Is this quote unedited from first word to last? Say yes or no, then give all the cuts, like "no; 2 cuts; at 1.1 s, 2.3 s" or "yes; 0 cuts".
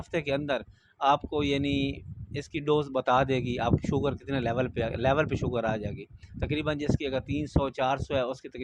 yes; 0 cuts